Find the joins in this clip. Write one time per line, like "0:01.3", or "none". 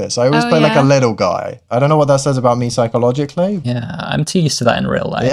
0:01.6
0:03.6

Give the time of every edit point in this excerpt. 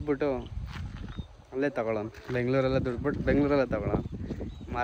none

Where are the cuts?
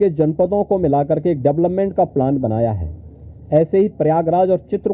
none

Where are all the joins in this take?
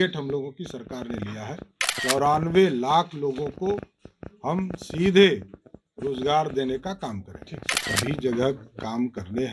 0:07.8

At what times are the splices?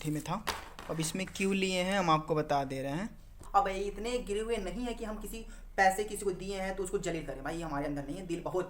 0:03.3

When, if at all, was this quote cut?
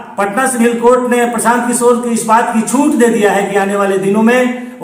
none

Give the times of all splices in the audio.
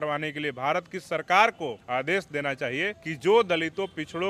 0:01.8
0:03.0

